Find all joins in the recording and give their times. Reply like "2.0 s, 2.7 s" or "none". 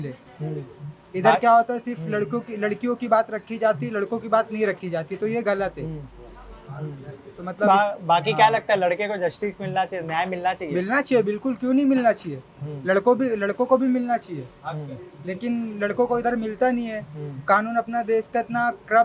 none